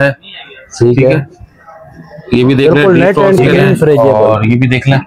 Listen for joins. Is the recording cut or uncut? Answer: cut